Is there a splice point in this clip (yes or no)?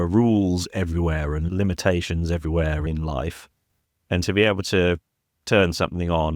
yes